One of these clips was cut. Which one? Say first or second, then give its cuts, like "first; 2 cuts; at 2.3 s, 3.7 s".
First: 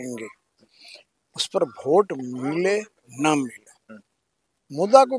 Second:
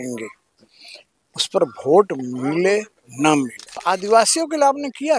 second; 1 cut; at 3.8 s